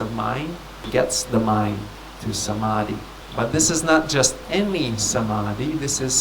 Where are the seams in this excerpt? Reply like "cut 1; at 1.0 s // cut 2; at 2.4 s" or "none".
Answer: cut 1; at 0.9 s // cut 2; at 3.2 s